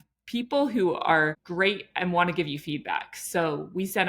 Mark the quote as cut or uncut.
cut